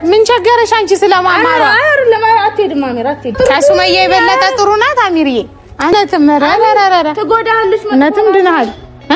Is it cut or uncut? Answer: cut